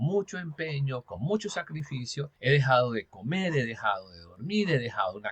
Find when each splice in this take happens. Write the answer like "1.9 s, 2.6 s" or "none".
2.3 s